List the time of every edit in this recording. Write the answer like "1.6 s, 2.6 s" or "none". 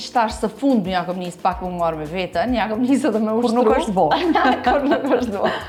none